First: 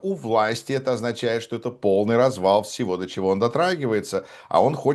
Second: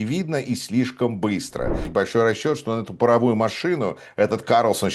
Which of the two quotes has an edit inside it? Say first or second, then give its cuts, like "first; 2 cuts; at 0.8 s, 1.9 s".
second; 1 cut; at 1.8 s